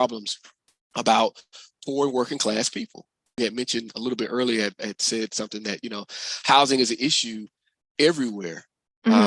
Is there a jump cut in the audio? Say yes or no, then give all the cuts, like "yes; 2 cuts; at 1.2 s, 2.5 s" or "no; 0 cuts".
yes; 1 cut; at 3.3 s